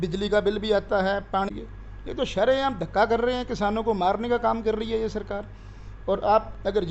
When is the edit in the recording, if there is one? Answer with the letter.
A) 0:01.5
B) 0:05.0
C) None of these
A